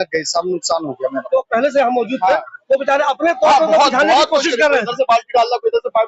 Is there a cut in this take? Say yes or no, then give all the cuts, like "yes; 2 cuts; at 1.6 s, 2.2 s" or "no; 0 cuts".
yes; 1 cut; at 1.2 s